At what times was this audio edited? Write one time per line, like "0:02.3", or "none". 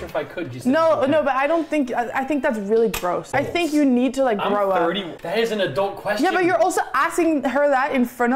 0:03.3
0:05.1